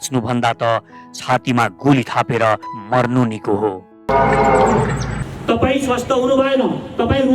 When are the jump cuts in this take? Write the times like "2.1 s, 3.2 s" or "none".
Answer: 5.3 s